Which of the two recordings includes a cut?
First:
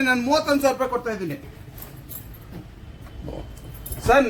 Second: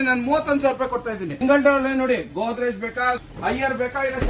second; 2 cuts; at 1.4 s, 3.2 s

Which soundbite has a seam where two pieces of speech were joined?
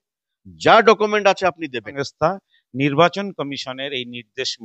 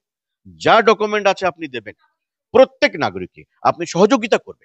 first; 1 cut; at 2.0 s

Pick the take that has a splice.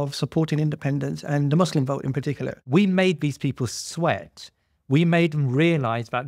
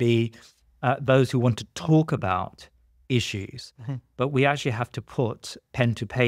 first; 1 cut; at 2.5 s

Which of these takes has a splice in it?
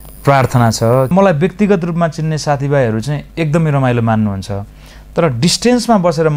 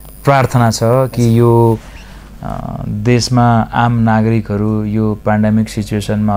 first; 1 cut; at 1.1 s

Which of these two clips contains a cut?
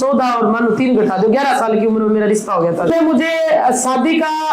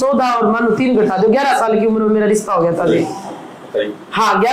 first; 1 cut; at 2.9 s

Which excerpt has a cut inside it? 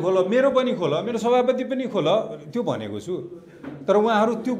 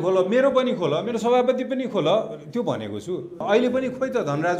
second; 1 cut; at 3.3 s

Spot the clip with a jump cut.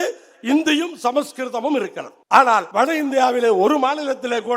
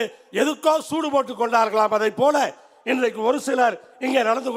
first; 2 cuts; at 2.1 s, 2.7 s

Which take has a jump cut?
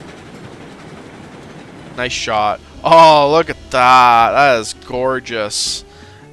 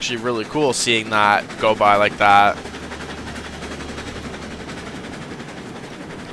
first; 1 cut; at 2.0 s

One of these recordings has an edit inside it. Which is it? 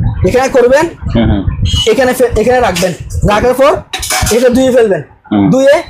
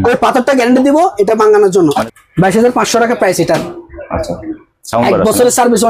second; 1 cut; at 2.0 s

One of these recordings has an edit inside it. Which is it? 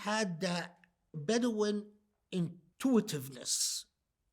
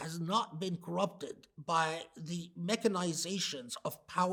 first; 2 cuts; at 1.2 s, 2.6 s

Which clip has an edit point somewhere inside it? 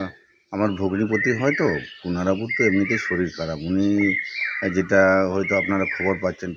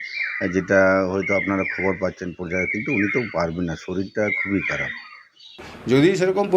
second; 1 cut; at 5.7 s

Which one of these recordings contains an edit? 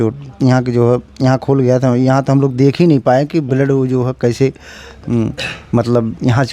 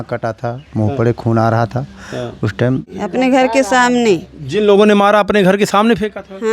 second; 1 cut; at 2.9 s

